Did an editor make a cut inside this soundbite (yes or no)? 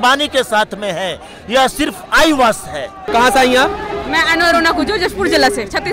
no